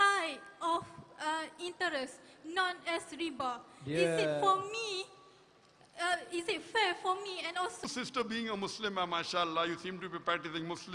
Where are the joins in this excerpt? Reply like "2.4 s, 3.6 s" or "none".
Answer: 7.8 s